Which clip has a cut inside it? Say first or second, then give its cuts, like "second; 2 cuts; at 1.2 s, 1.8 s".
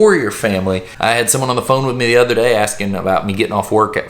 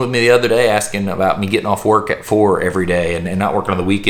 first; 1 cut; at 1.0 s